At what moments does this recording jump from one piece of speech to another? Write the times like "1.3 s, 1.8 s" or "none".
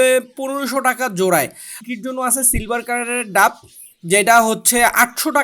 1.7 s